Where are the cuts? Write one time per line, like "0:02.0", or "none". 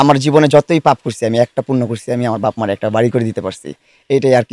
none